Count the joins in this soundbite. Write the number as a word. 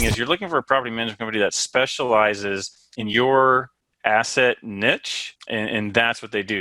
one